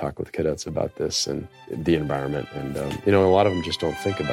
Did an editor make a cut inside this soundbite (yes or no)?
yes